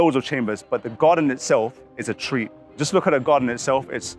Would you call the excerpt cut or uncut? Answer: uncut